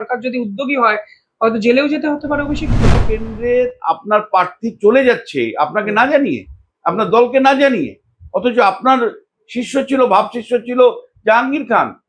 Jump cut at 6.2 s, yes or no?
no